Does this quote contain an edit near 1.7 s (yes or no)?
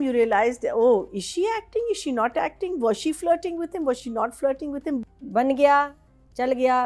no